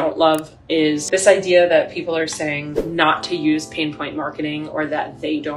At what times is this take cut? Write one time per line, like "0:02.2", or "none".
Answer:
0:01.0